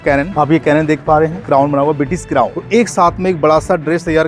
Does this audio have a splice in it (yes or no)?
yes